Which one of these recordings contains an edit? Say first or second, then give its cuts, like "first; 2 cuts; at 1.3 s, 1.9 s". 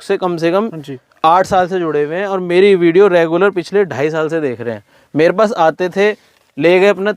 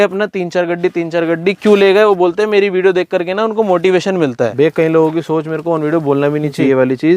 second; 1 cut; at 4.5 s